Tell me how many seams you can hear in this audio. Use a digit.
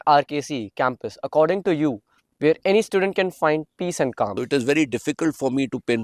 1